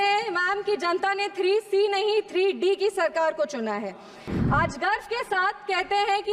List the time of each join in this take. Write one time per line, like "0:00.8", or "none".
0:04.3